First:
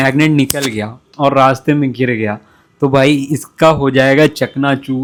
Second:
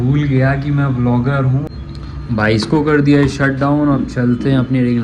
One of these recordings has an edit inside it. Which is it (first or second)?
second